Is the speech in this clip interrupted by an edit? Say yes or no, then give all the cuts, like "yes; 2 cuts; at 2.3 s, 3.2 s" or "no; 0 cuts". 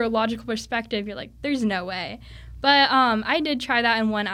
no; 0 cuts